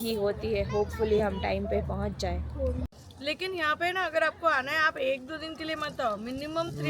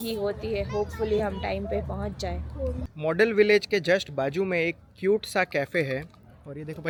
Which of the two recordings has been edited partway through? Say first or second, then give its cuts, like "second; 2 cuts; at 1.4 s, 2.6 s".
first; 1 cut; at 2.9 s